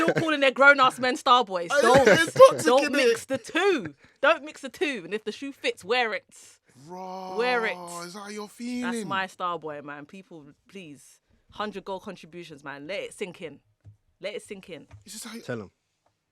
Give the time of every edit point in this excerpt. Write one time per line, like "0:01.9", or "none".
none